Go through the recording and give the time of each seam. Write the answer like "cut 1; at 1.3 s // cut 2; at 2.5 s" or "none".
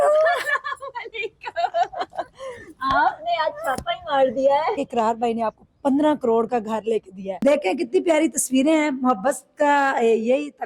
cut 1; at 4.8 s // cut 2; at 7.3 s